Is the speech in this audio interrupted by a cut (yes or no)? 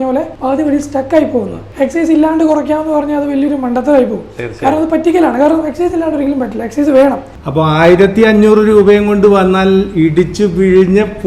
yes